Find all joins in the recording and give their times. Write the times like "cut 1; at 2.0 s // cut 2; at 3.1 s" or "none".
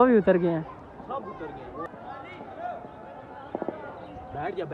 cut 1; at 1.9 s